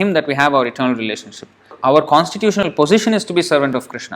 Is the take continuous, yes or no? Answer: no